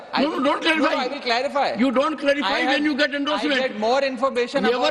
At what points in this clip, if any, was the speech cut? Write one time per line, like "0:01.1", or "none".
none